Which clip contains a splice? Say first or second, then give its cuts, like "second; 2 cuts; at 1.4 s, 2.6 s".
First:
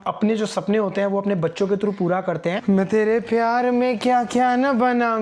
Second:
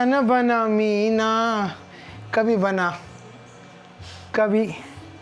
first; 1 cut; at 2.6 s